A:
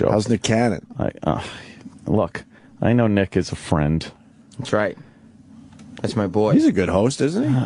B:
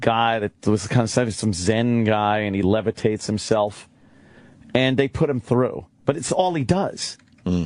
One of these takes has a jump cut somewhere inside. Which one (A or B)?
B